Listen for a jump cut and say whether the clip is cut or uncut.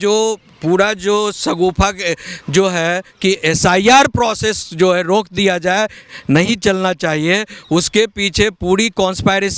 uncut